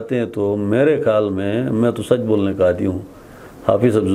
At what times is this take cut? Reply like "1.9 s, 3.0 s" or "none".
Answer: none